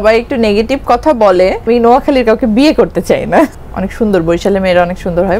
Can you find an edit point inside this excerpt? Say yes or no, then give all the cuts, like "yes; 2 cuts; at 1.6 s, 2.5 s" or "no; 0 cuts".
yes; 2 cuts; at 1.6 s, 3.6 s